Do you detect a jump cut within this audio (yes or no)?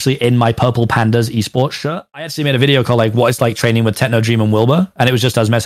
yes